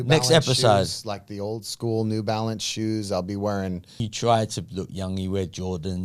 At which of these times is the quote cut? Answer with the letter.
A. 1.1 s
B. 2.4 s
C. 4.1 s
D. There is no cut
C